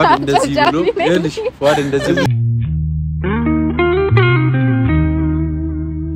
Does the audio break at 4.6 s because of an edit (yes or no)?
no